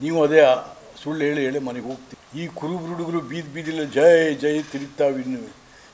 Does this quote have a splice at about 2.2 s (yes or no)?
yes